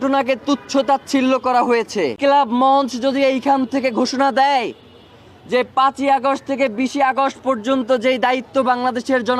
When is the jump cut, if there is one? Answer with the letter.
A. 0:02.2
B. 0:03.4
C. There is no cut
A